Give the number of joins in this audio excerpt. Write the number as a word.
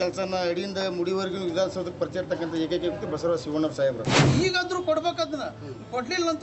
one